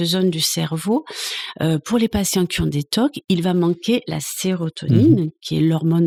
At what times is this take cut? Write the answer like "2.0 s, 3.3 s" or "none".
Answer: none